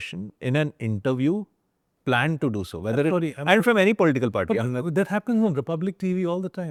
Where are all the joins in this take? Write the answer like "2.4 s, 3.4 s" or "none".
none